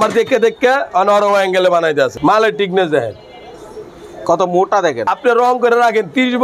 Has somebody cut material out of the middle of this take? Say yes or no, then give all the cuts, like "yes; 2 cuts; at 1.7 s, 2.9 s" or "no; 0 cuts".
yes; 2 cuts; at 2.1 s, 5.1 s